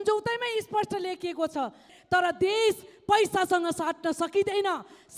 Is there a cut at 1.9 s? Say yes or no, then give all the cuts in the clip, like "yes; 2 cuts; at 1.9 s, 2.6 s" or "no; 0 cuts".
yes; 1 cut; at 1.9 s